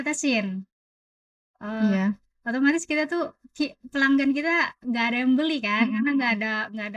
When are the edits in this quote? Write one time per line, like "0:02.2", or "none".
none